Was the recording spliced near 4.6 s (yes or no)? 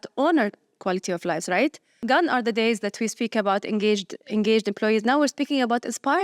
no